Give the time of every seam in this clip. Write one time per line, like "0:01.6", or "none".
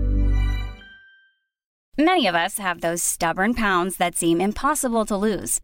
0:01.8